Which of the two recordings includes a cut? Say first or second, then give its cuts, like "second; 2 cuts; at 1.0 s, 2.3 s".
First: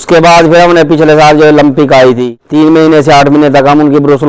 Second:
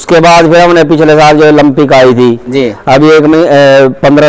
first; 1 cut; at 2.4 s